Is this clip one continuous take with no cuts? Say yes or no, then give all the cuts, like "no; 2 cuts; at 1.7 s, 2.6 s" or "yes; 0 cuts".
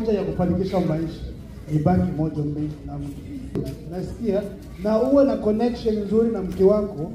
no; 1 cut; at 3.7 s